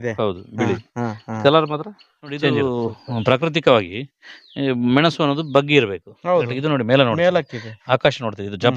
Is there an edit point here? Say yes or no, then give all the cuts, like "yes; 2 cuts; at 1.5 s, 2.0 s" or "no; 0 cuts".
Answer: yes; 1 cut; at 2.5 s